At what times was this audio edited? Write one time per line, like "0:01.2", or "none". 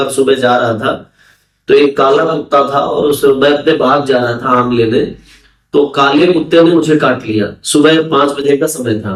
none